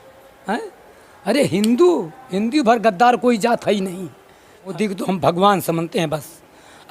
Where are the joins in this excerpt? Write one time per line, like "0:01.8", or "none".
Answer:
0:04.7